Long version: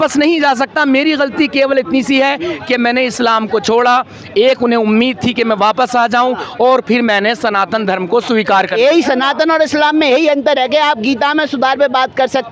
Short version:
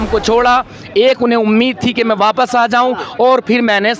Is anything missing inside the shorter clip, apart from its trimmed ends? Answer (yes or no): no